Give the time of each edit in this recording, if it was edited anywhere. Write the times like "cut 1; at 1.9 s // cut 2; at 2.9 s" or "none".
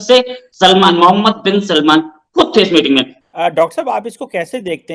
cut 1; at 3.2 s